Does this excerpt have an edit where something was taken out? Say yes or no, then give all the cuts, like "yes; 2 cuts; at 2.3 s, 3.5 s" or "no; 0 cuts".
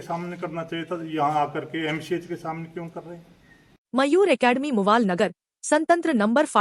no; 0 cuts